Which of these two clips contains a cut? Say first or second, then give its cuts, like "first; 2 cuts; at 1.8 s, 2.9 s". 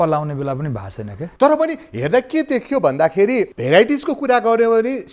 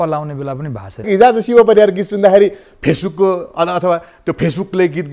second; 1 cut; at 1.1 s